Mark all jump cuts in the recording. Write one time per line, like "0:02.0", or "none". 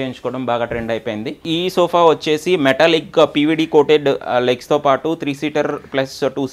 0:01.4